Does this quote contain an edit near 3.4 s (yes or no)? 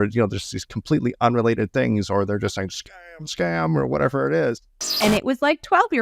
no